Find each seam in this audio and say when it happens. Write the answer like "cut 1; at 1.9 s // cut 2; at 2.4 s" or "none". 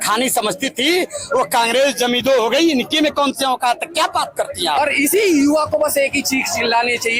cut 1; at 4.8 s